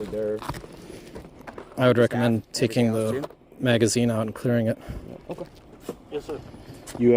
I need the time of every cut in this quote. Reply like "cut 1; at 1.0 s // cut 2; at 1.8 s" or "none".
cut 1; at 5.6 s